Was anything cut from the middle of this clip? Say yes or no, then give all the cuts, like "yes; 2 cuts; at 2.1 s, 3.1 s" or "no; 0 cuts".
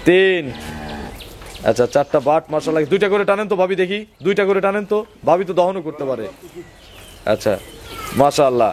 no; 0 cuts